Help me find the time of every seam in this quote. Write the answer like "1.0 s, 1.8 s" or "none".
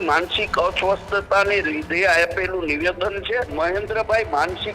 3.5 s